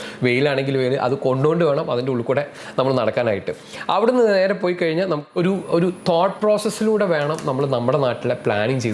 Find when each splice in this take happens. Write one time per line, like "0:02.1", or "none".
0:05.2